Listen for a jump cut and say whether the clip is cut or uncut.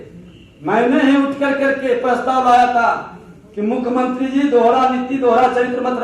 uncut